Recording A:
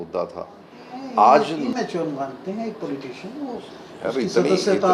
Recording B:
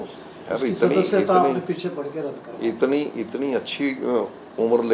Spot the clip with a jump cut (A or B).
A